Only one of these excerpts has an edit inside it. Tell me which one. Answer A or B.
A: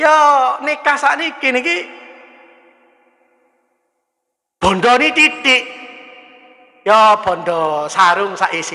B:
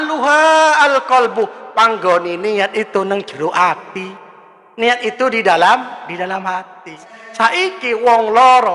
B